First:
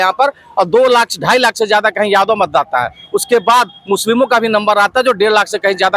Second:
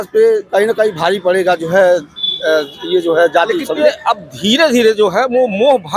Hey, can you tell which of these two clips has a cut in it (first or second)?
second